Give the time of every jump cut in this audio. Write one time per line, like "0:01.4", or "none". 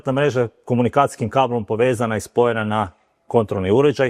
none